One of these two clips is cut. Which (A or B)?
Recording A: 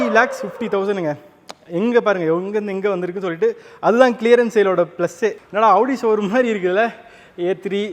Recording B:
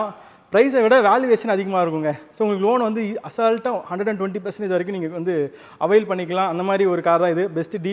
A